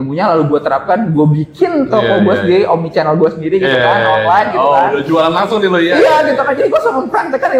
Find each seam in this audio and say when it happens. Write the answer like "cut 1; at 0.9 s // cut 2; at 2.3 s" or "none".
none